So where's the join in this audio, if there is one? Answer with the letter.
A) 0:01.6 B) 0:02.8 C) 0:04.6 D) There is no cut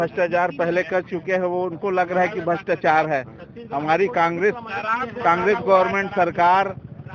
D